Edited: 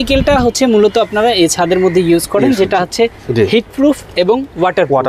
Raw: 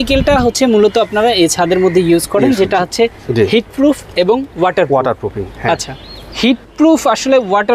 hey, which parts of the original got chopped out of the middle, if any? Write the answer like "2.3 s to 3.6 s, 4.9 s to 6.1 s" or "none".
none